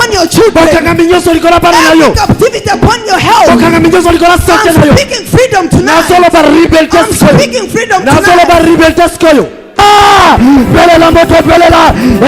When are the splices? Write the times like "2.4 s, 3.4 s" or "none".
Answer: 9.8 s